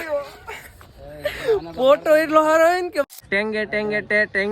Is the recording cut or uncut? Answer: cut